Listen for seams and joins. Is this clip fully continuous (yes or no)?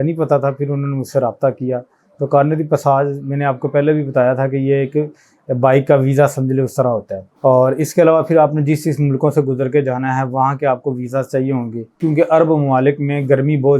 no